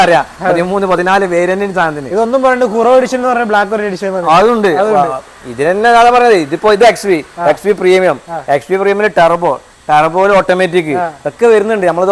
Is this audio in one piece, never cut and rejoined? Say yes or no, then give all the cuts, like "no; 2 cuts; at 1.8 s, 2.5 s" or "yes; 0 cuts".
yes; 0 cuts